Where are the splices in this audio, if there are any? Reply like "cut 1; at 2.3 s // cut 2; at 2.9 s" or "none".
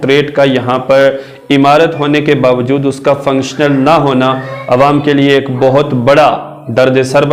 none